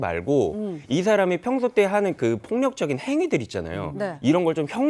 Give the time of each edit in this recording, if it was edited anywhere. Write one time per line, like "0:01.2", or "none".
none